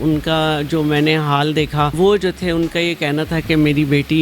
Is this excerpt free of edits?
no; 1 cut; at 2.0 s

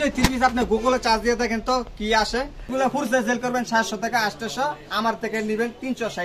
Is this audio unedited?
no; 1 cut; at 2.7 s

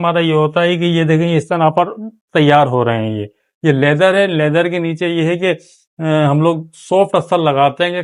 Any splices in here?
no; 0 cuts

